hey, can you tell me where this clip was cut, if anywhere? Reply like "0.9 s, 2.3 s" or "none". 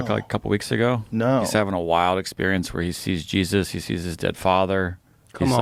none